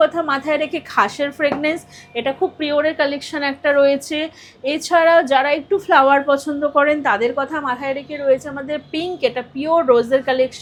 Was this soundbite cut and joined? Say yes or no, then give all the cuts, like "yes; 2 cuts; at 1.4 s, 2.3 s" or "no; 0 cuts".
no; 0 cuts